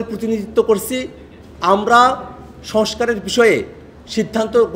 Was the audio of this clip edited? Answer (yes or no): no